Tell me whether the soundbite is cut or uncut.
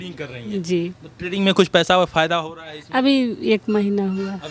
uncut